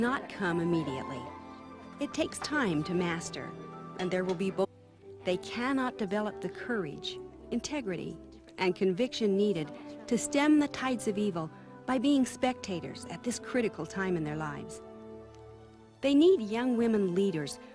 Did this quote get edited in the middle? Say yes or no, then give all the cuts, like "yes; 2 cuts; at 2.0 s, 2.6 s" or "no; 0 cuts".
no; 0 cuts